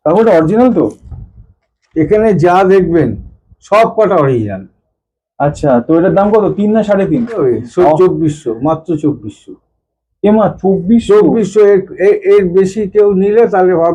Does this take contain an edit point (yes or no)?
yes